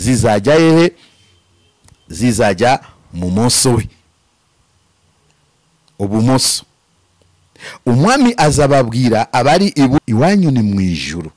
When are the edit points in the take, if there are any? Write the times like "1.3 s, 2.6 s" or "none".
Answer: 10.0 s